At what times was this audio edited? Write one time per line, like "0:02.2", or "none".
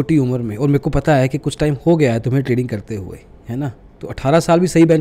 none